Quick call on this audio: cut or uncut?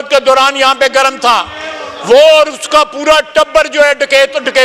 uncut